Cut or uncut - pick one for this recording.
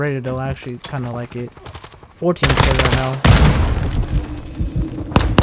uncut